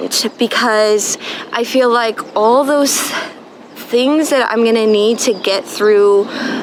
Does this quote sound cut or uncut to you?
uncut